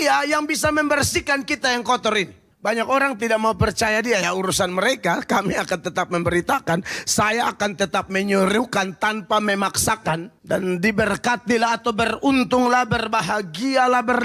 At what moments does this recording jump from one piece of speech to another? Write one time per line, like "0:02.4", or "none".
0:02.4
0:10.3